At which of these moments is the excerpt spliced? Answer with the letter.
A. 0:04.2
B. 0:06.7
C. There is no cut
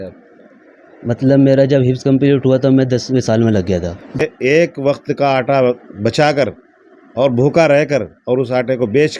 A